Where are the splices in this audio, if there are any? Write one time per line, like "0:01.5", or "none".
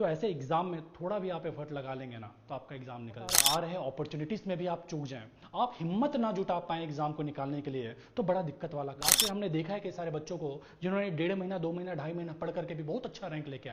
0:03.4
0:09.2